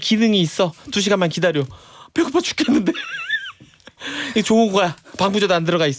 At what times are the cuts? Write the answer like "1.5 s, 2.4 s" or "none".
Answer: none